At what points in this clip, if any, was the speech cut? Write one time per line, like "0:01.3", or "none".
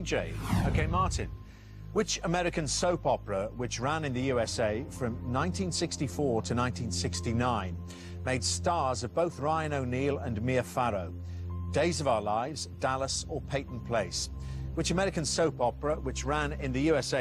none